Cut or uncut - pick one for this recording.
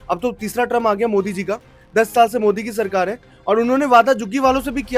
uncut